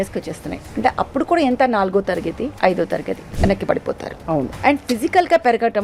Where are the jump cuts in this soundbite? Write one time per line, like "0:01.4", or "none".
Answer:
0:02.5
0:03.2
0:04.5

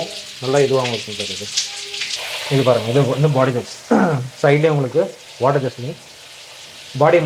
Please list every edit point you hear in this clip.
none

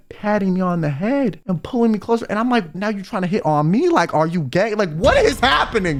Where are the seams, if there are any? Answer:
none

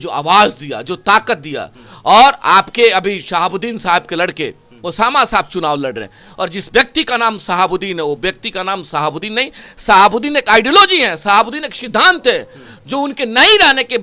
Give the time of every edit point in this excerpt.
none

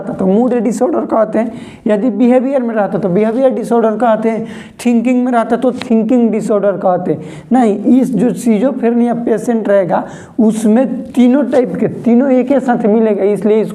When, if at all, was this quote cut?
none

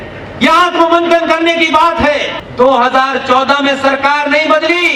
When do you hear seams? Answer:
0:02.4

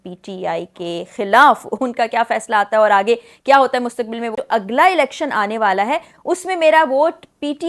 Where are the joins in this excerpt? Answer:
0:04.4

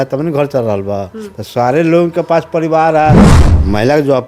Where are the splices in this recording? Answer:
0:03.3

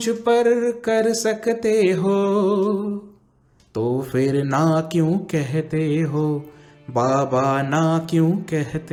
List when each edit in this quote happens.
none

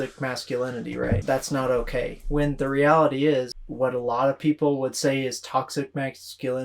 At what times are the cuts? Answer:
0:01.2
0:03.6

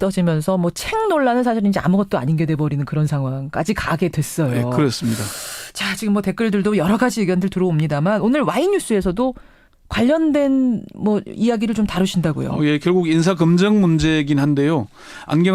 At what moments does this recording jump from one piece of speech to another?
0:13.7

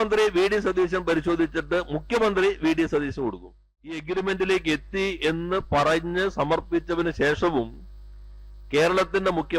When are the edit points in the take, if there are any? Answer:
0:04.0

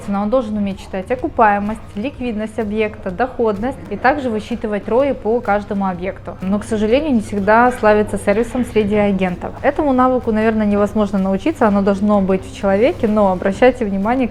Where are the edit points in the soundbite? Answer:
0:03.9
0:06.3
0:09.5

